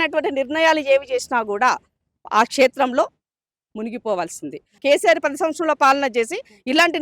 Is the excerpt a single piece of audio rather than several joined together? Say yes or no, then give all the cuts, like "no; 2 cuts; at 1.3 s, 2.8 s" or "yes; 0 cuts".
no; 1 cut; at 4.7 s